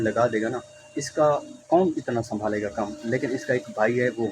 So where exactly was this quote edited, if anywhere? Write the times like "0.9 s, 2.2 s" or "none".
none